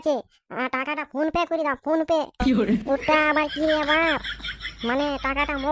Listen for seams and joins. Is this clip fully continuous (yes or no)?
yes